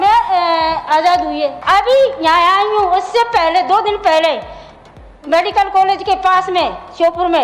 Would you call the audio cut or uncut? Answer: cut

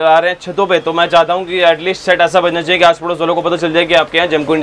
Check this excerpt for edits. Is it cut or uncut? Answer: uncut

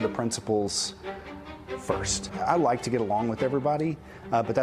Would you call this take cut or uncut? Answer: cut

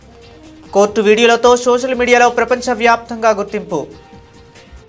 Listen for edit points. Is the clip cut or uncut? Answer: cut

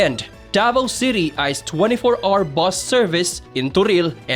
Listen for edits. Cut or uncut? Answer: uncut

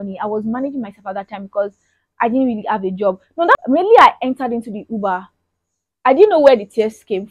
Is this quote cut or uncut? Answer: cut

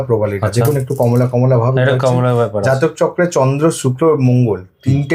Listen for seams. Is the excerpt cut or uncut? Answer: uncut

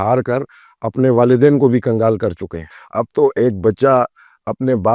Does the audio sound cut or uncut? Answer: cut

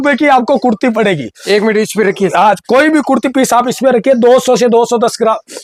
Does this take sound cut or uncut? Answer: uncut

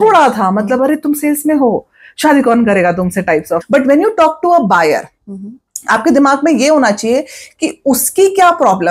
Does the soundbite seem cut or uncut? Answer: cut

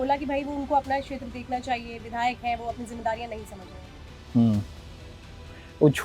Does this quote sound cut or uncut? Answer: uncut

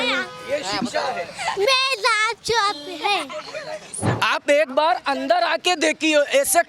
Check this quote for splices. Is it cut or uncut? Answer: cut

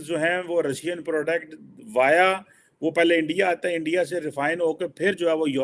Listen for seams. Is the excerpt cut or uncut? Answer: uncut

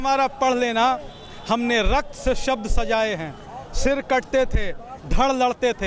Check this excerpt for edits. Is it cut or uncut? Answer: uncut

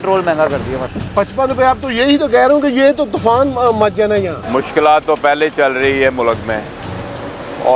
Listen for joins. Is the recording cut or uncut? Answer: cut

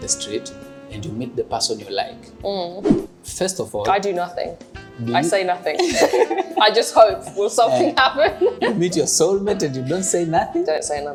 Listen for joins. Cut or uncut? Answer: uncut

